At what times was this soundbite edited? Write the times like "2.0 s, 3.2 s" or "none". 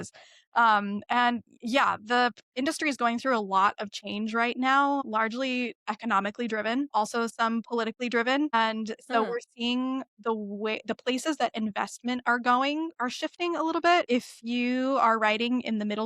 5.1 s, 6.9 s, 8.5 s, 14.1 s